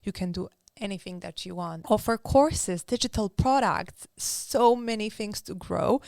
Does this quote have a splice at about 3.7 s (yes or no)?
no